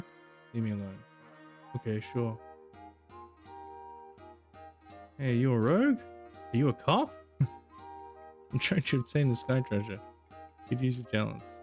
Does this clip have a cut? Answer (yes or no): no